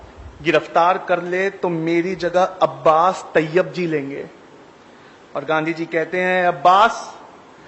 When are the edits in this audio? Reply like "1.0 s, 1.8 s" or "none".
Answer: none